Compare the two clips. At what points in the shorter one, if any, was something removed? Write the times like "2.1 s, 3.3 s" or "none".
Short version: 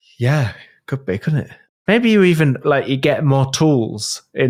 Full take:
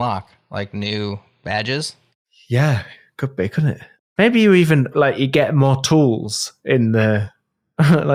none